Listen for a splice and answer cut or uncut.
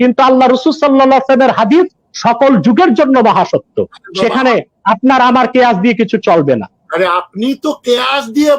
uncut